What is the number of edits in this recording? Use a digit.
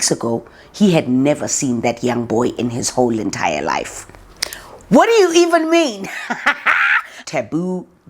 1